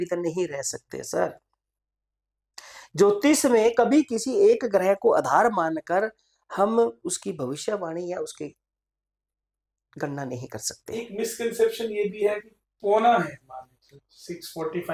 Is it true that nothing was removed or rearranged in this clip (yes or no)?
yes